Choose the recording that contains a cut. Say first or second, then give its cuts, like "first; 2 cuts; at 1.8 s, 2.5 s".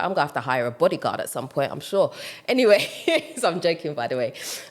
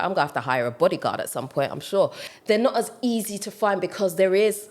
second; 1 cut; at 2.3 s